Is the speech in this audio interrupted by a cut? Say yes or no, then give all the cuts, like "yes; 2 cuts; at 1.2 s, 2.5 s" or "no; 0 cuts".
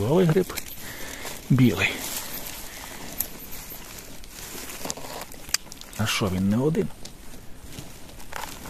no; 0 cuts